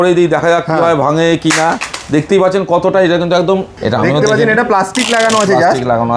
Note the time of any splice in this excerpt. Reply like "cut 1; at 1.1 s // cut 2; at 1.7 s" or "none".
cut 1; at 3.7 s